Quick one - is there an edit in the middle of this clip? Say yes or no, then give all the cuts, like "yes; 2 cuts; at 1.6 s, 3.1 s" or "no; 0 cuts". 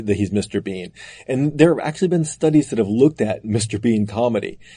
no; 0 cuts